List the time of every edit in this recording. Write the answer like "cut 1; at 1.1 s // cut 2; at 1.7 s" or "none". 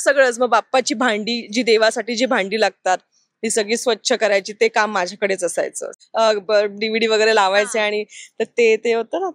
cut 1; at 5.9 s